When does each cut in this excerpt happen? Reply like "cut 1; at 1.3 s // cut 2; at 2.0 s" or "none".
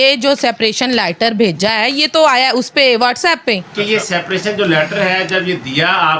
cut 1; at 3.7 s